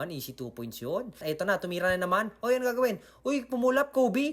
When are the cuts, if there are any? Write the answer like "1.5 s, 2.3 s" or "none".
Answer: 1.2 s